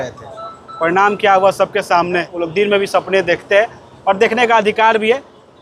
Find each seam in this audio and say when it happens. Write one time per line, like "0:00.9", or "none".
0:02.3

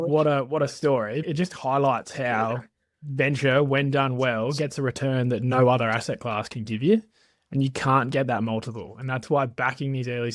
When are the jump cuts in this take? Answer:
0:01.2

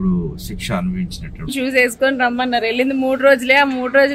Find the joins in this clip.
0:01.5

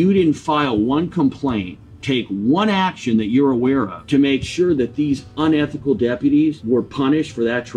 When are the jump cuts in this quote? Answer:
0:04.0
0:06.6

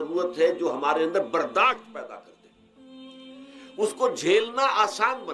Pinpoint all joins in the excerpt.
none

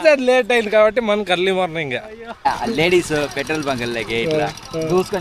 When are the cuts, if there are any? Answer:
0:02.5

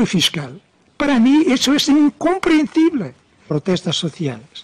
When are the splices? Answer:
0:03.5

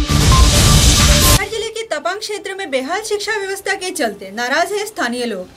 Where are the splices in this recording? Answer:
none

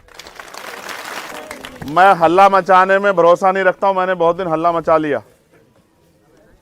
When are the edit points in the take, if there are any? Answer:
0:01.3

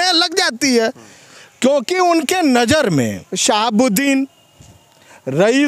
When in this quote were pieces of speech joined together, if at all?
0:03.3

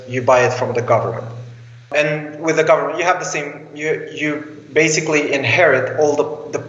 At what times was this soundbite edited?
0:01.8

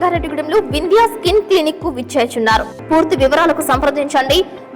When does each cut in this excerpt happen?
0:02.7

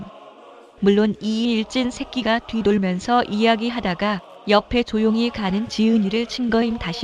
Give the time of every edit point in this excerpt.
0:02.5

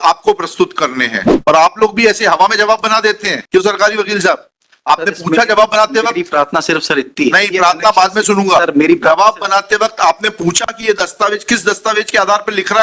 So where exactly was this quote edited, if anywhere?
0:01.3

